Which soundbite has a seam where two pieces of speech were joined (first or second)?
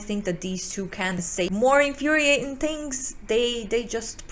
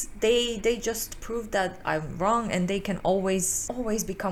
first